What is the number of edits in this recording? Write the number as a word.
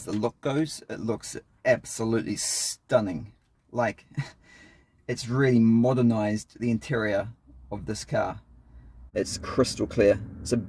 one